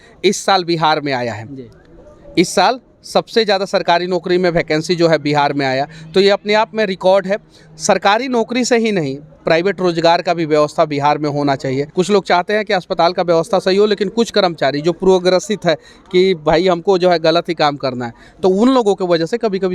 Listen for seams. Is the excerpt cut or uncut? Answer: cut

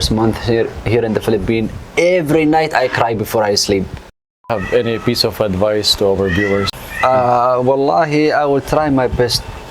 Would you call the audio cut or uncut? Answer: cut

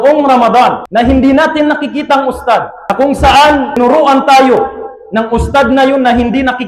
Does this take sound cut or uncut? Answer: cut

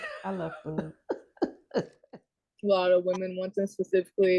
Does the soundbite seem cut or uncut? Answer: cut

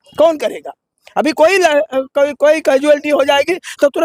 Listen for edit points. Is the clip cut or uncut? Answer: uncut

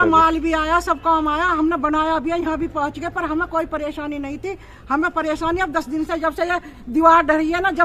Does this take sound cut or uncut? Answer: uncut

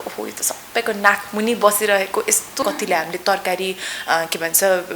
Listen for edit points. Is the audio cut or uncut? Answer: cut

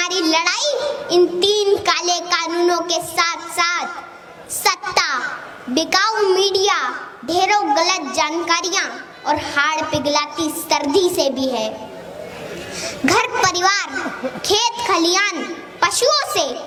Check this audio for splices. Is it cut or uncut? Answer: uncut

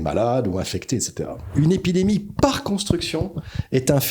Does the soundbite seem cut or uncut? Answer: cut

